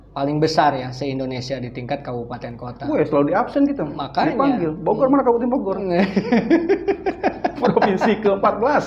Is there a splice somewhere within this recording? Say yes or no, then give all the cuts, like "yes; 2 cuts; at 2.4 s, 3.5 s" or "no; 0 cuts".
no; 0 cuts